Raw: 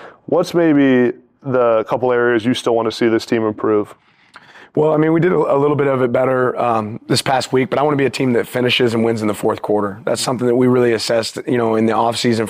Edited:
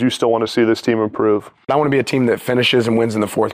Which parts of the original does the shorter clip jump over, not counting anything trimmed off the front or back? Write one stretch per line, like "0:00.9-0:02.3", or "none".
0:04.1-0:07.7